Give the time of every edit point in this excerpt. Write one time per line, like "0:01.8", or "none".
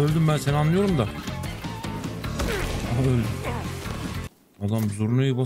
0:01.4
0:04.3